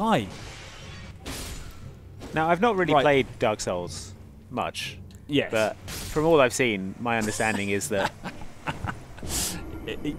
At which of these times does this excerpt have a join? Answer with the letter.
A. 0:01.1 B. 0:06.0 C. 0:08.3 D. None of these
A